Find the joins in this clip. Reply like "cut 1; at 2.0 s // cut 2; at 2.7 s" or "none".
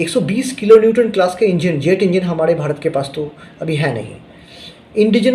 none